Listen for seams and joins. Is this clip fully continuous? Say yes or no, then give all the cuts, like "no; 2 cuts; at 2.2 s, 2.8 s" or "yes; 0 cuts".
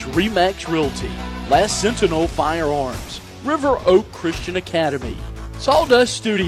yes; 0 cuts